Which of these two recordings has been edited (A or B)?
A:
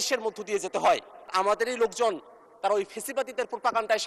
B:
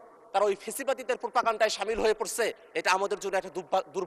A